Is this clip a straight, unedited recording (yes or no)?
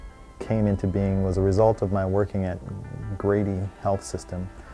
no